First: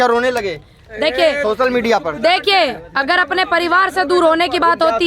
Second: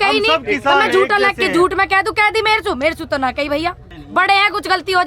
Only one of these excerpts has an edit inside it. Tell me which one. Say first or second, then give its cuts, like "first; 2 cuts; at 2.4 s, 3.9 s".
second; 1 cut; at 3.9 s